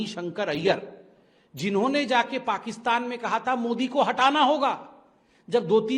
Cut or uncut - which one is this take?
uncut